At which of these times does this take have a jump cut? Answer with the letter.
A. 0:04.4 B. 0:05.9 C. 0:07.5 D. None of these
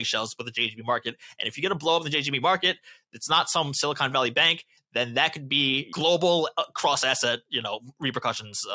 B